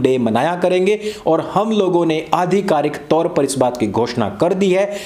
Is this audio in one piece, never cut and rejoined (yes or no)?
yes